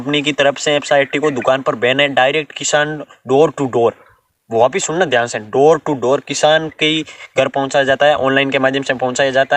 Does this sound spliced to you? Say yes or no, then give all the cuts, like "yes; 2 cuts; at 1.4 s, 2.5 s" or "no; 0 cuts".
no; 0 cuts